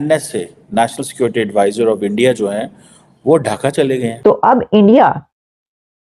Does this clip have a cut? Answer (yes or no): yes